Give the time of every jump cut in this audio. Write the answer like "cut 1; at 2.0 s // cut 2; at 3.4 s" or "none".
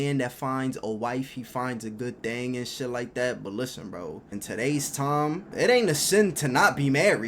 cut 1; at 4.3 s // cut 2; at 5.5 s

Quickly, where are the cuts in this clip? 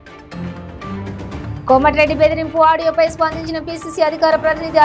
cut 1; at 0.9 s

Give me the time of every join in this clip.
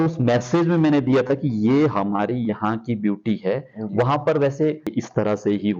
cut 1; at 4.9 s

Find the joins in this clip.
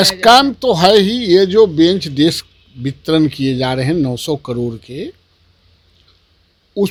none

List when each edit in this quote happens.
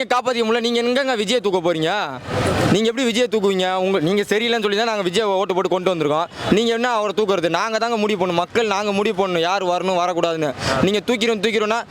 none

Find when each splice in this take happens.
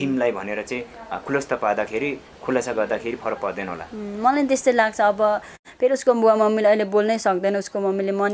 cut 1; at 5.6 s

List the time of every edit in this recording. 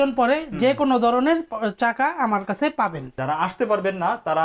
cut 1; at 3.2 s

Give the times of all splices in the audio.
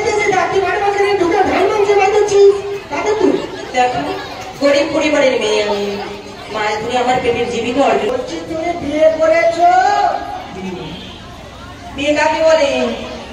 cut 1; at 8.1 s

